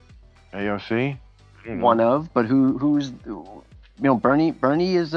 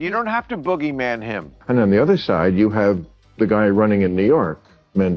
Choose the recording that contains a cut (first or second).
second